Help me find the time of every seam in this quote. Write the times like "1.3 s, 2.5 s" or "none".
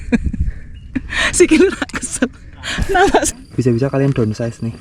3.3 s

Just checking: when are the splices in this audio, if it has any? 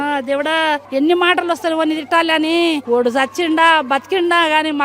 0.8 s, 2.8 s

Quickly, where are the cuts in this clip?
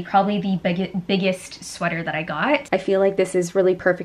2.6 s

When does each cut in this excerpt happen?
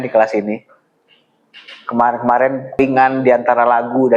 2.8 s

